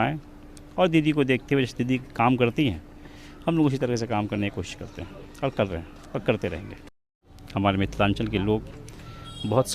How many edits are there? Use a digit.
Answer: 1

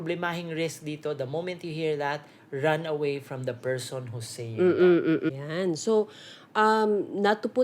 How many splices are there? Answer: 1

